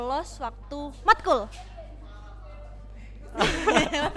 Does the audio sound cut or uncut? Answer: uncut